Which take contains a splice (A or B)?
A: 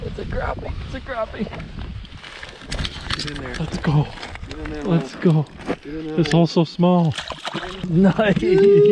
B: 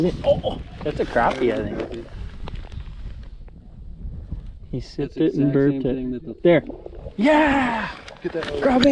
A